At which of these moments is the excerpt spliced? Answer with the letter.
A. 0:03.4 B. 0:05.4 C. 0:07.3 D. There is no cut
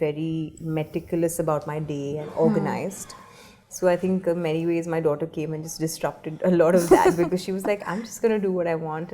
D